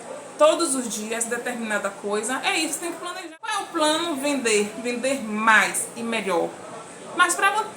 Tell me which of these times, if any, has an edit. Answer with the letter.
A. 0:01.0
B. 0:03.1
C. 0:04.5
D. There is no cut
B